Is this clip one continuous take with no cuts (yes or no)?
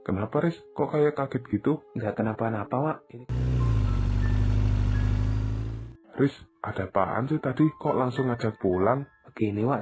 no